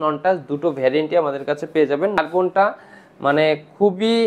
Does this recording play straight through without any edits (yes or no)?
no